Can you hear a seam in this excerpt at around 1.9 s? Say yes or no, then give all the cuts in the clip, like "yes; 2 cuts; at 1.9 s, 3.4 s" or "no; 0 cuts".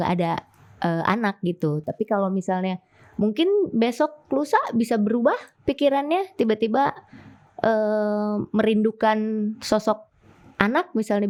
no; 0 cuts